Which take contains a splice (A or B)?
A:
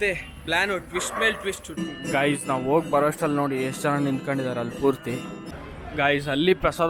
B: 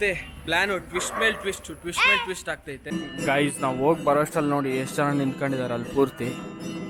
A